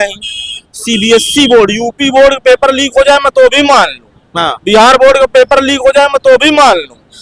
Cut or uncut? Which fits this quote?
uncut